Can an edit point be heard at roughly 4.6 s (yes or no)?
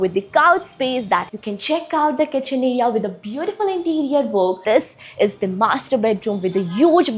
yes